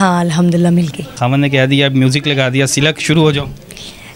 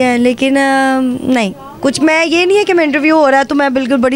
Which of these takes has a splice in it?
first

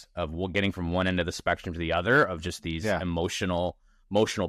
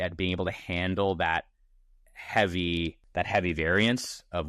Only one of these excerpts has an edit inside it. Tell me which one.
second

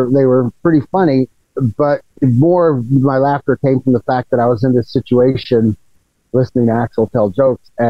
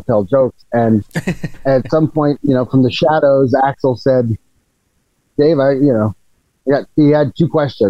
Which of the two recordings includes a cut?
first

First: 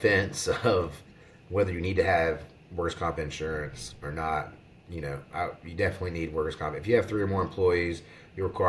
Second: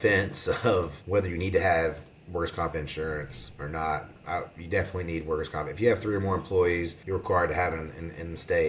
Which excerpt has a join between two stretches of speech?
second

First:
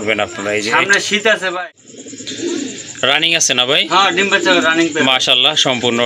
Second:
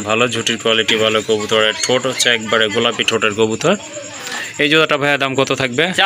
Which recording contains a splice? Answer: first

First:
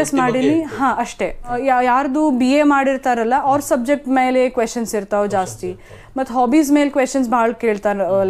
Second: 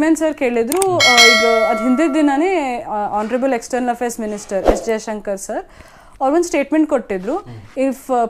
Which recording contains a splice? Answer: first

